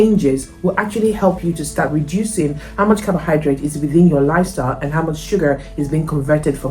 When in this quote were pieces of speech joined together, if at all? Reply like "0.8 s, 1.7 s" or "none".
none